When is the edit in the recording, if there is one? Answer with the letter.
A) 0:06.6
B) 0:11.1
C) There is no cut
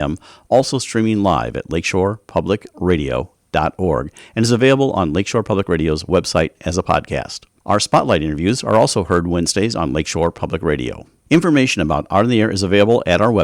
B